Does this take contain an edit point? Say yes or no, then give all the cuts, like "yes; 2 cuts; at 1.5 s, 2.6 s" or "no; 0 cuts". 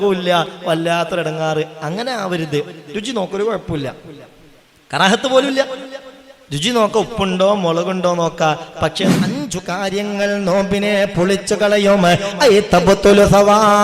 yes; 1 cut; at 9.1 s